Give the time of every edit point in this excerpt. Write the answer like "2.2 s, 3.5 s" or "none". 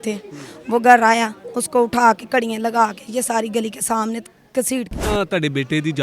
5.0 s